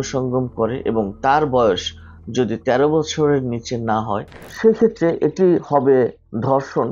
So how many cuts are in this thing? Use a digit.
1